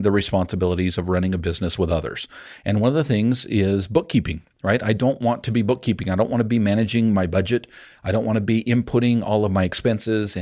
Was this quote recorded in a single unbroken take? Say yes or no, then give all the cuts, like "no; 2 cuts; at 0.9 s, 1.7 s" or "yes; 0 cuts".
yes; 0 cuts